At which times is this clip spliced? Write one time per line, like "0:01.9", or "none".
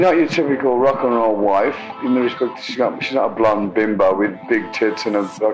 none